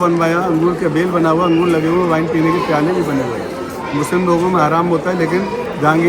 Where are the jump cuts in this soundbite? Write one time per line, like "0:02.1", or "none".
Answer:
none